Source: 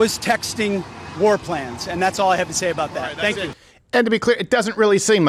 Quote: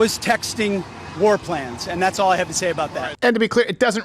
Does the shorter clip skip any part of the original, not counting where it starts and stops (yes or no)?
yes